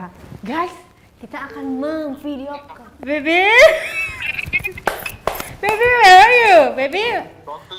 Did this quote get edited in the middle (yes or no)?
no